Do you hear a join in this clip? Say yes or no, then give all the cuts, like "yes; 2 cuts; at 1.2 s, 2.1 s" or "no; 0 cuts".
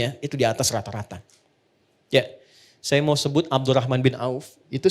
no; 0 cuts